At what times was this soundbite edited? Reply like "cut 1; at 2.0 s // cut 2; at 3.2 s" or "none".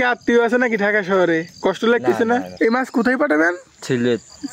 cut 1; at 2.5 s